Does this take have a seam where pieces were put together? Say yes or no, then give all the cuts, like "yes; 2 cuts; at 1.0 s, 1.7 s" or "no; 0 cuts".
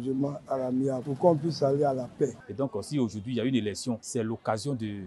yes; 2 cuts; at 1.1 s, 2.4 s